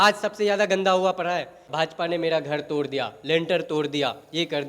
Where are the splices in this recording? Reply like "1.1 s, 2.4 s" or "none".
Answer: 1.6 s